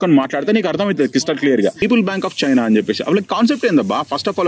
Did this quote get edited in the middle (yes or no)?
yes